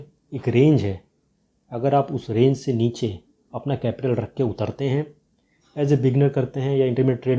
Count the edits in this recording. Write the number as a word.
zero